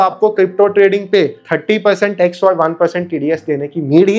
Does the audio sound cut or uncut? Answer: uncut